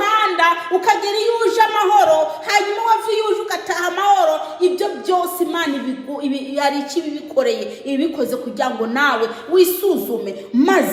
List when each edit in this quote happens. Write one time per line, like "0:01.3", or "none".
none